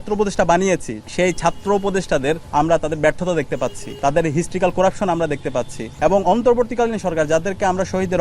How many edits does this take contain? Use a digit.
4